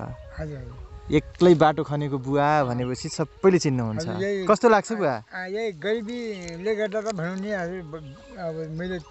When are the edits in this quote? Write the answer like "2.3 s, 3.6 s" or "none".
none